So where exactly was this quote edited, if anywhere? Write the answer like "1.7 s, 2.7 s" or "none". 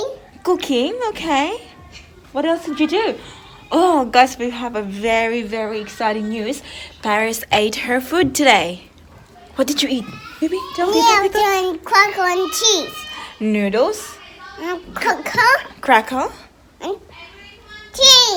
none